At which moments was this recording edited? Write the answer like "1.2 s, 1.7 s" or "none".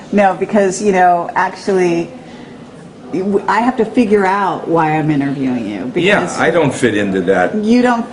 5.4 s